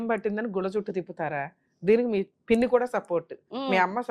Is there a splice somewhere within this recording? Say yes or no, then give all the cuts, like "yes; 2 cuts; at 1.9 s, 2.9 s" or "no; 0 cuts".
yes; 1 cut; at 2.3 s